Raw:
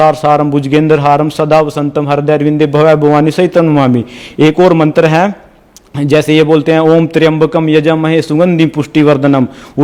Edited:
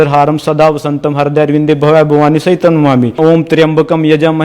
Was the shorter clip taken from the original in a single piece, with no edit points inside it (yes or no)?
no